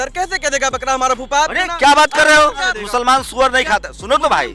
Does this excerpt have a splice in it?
yes; 1 cut; at 2.8 s

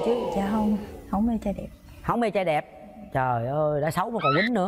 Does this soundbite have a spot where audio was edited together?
no; 0 cuts

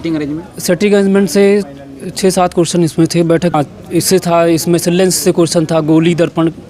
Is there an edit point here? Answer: yes; 1 cut; at 3.5 s

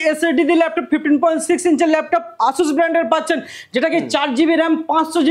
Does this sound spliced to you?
no; 0 cuts

